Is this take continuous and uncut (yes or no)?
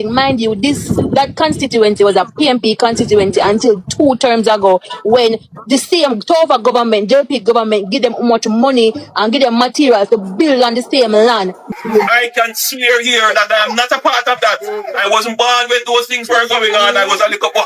no